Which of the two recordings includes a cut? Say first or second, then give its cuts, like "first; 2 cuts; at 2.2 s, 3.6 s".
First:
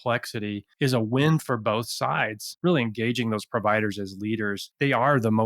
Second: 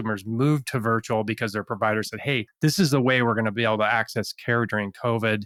first; 1 cut; at 2.5 s